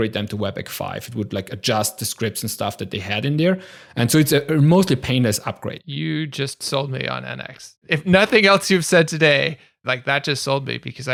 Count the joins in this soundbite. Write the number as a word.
zero